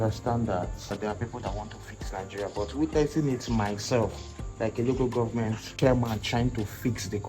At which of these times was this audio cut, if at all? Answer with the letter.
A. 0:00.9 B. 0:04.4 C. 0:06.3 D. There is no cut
A